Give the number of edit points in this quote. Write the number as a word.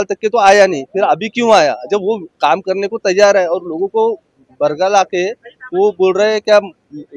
zero